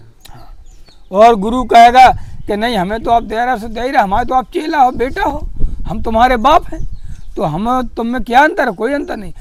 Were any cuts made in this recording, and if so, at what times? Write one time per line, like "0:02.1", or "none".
none